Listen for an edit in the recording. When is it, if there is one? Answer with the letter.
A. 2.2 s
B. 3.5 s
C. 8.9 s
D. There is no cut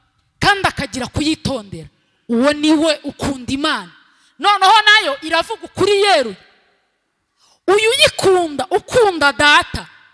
D